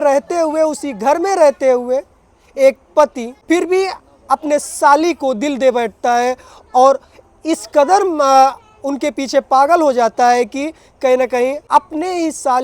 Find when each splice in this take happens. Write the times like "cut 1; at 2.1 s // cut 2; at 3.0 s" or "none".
cut 1; at 3.3 s // cut 2; at 11.6 s